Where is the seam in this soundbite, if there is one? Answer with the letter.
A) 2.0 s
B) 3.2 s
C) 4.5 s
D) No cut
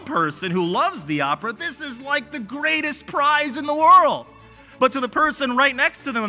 D